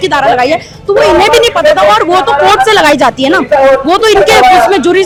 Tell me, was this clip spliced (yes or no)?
no